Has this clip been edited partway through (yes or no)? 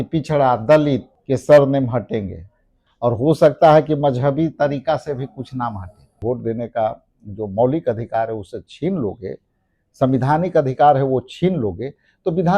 yes